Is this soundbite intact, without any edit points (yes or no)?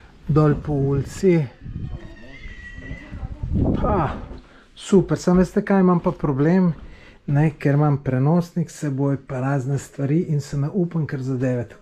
yes